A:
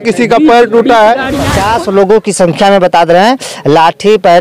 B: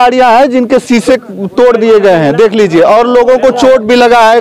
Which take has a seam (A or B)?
A